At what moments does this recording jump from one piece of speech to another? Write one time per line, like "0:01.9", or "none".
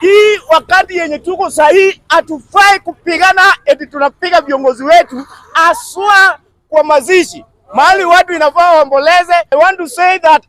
0:09.5